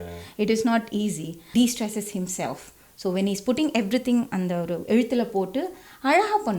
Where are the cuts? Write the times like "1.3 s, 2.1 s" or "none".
1.3 s